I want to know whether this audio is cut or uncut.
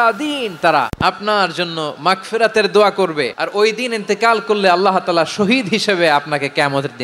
cut